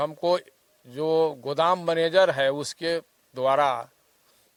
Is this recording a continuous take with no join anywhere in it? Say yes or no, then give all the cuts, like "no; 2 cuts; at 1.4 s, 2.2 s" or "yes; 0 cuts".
yes; 0 cuts